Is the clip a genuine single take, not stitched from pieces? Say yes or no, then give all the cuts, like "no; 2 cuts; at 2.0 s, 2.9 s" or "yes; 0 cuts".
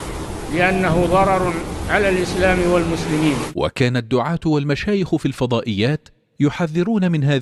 no; 1 cut; at 3.5 s